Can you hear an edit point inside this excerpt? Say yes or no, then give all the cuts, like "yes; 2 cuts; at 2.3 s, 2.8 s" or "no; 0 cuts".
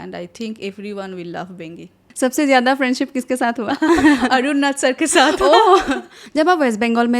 yes; 2 cuts; at 2.0 s, 6.1 s